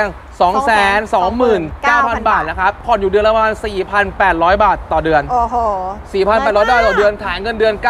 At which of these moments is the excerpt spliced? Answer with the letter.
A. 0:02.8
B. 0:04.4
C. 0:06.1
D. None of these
A